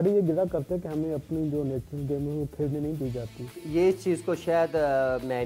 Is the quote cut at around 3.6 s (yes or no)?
yes